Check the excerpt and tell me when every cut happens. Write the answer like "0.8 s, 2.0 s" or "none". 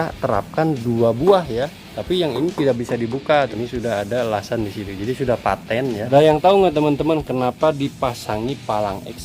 1.9 s, 3.5 s, 6.1 s